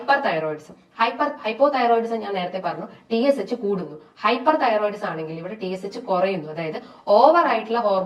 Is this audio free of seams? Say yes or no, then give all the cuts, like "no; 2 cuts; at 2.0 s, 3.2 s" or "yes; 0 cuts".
yes; 0 cuts